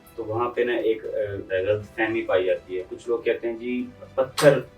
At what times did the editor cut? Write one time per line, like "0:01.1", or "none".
0:01.5
0:02.9